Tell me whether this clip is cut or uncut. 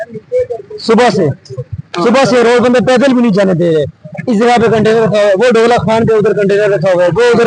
uncut